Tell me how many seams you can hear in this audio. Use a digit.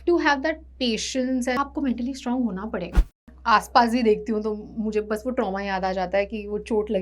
2